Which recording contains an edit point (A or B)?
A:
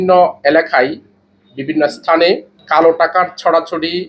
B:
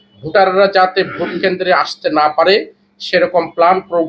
A